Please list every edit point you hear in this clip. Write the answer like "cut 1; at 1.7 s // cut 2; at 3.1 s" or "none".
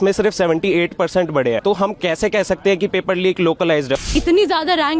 cut 1; at 1.6 s // cut 2; at 4.1 s